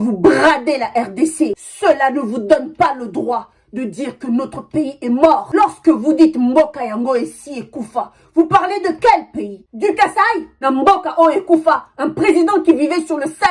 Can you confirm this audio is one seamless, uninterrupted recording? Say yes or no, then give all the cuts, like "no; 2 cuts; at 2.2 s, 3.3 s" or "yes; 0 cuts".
no; 2 cuts; at 1.6 s, 10.5 s